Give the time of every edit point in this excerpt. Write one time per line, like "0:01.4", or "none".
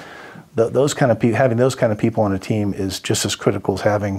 none